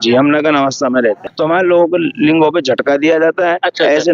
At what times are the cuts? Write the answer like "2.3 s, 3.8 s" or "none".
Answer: 1.3 s